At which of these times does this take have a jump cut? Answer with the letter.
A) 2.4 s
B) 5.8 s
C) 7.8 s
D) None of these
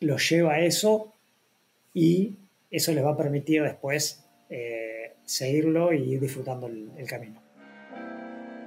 C